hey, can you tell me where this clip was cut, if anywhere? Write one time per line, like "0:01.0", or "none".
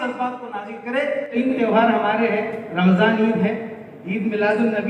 0:01.4